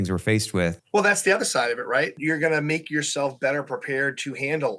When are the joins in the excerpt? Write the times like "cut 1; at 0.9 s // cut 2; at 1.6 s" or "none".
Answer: cut 1; at 0.8 s // cut 2; at 2.2 s